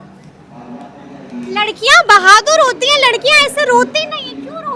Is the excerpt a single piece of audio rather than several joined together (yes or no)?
yes